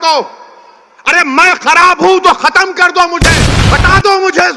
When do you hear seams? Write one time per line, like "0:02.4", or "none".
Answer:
0:03.5